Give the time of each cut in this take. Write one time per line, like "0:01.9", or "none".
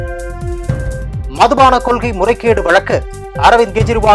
0:01.1